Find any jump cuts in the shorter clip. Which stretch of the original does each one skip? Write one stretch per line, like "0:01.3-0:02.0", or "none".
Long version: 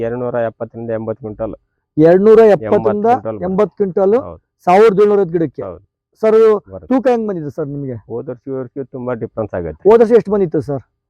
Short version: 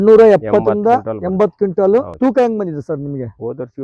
0:04.3-0:06.8